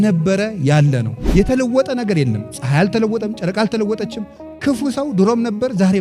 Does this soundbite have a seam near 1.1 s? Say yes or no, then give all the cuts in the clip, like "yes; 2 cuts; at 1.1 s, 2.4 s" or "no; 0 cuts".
yes; 1 cut; at 1.1 s